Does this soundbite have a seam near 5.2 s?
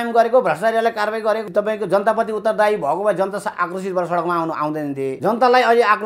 yes; 2 cuts; at 1.4 s, 5.2 s

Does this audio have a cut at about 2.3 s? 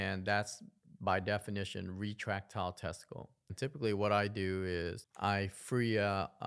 no; 2 cuts; at 3.5 s, 5.0 s

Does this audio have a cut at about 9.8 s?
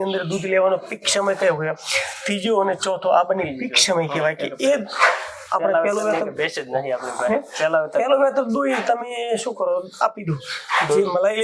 no; 0 cuts

